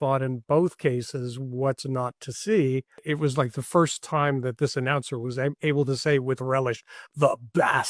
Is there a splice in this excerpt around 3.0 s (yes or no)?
yes